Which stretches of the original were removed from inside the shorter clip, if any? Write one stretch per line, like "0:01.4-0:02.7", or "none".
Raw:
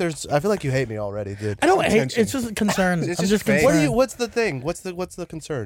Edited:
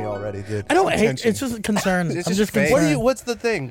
none